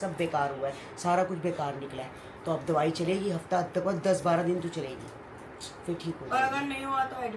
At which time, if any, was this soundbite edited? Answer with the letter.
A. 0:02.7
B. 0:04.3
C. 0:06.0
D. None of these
D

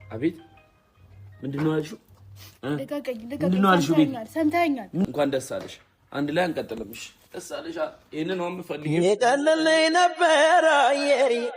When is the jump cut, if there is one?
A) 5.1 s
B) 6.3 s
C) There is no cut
A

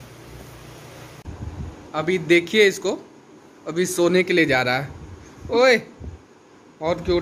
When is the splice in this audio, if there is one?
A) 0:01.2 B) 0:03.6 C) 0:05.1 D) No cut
A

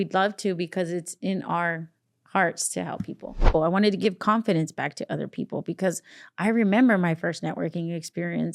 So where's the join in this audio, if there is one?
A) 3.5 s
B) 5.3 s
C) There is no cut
A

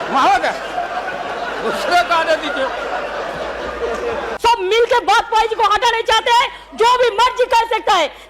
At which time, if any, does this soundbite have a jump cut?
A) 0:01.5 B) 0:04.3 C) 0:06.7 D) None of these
B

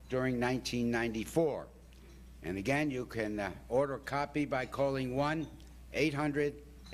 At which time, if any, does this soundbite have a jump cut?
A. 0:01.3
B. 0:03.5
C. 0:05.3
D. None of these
B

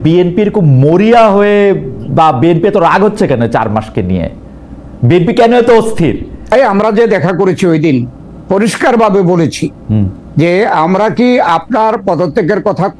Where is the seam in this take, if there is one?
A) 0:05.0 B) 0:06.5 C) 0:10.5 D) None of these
B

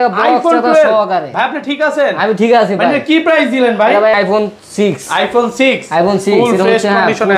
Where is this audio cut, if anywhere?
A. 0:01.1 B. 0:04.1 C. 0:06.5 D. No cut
B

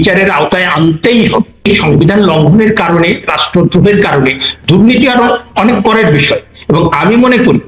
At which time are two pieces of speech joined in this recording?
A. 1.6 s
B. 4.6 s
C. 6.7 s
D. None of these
A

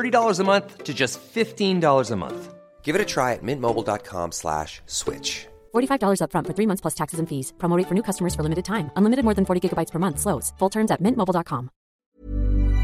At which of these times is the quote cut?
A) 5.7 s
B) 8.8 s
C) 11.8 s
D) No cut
C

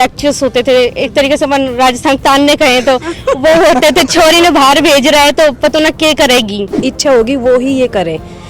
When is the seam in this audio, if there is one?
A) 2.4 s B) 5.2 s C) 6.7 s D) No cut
C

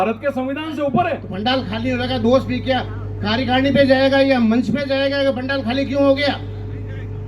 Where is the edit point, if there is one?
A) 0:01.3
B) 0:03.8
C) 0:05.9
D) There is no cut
A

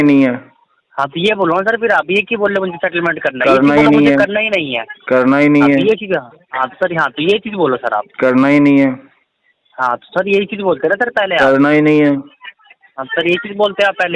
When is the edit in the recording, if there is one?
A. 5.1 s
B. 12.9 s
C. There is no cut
C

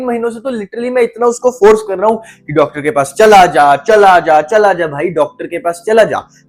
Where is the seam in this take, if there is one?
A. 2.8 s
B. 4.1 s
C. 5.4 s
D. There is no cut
D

